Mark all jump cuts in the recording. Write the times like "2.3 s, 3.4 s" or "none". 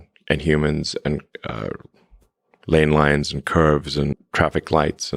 4.2 s